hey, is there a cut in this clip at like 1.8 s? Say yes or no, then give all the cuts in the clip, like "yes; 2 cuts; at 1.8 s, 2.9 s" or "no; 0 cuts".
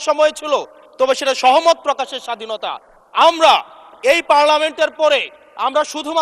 no; 0 cuts